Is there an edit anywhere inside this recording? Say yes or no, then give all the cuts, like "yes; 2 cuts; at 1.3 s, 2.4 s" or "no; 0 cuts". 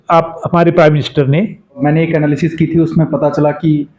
yes; 1 cut; at 1.8 s